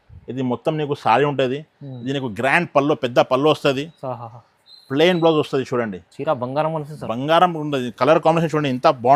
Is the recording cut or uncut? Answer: uncut